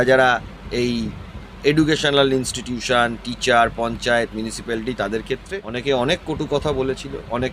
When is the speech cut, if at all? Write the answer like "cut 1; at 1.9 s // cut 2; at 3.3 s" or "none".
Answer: cut 1; at 5.6 s